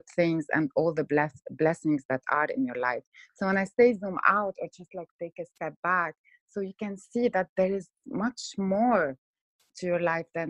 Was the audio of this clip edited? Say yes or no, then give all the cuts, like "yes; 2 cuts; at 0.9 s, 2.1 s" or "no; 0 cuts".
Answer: no; 0 cuts